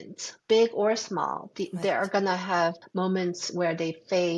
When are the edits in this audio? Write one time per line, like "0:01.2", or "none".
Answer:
0:02.8